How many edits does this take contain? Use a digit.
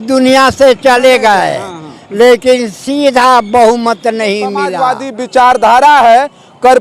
1